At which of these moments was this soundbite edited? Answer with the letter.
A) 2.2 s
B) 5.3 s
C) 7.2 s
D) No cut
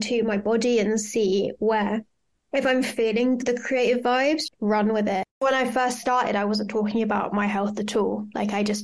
B